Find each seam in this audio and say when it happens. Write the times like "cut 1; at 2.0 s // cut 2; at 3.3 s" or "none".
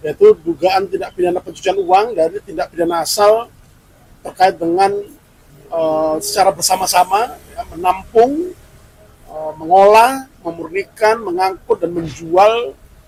none